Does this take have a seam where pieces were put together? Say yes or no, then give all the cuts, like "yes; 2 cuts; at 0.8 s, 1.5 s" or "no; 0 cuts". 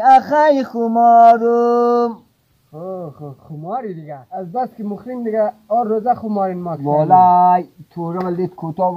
yes; 1 cut; at 4.1 s